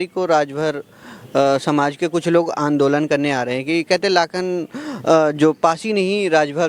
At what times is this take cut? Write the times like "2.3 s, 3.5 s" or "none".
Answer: none